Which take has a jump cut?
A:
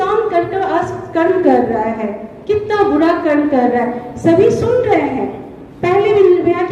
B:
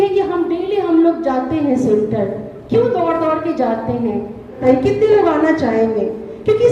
B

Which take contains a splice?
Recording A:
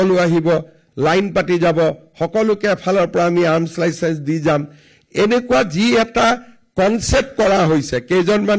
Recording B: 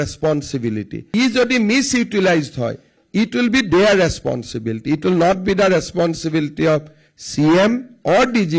B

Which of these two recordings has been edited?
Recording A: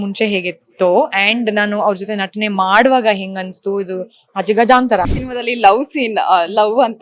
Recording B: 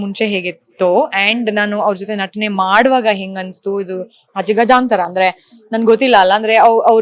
A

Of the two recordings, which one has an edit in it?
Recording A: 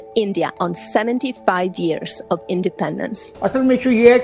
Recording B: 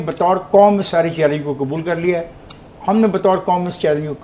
A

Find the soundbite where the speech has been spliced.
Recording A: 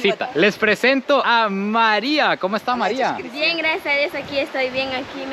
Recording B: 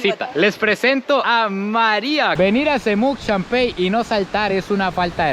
B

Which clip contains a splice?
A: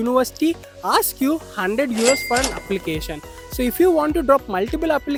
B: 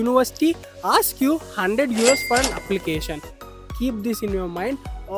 B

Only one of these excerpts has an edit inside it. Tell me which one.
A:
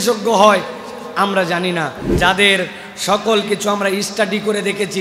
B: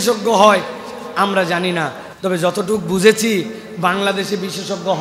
A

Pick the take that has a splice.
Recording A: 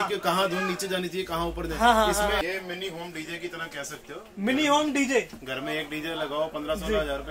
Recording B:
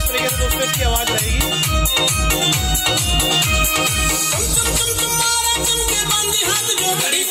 A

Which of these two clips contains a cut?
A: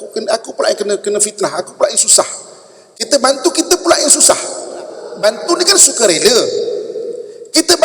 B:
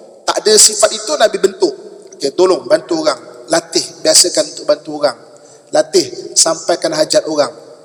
A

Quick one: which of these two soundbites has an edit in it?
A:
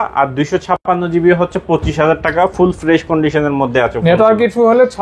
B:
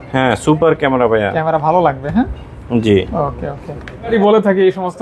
B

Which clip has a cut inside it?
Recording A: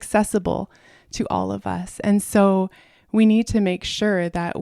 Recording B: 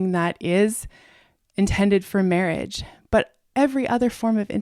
B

